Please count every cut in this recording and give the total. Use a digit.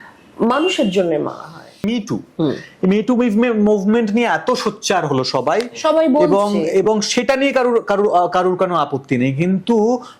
1